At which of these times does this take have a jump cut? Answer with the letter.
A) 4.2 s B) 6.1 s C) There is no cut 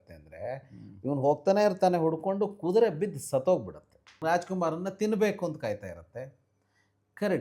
A